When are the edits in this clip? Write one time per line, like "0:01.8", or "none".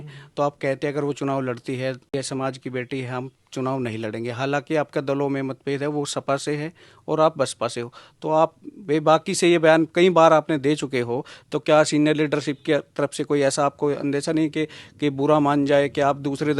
0:02.1